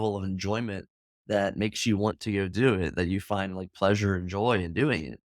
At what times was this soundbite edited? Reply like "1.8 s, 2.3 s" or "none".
none